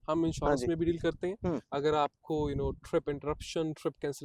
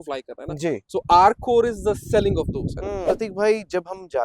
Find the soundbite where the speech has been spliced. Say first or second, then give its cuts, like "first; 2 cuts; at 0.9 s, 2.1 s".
second; 1 cut; at 3.1 s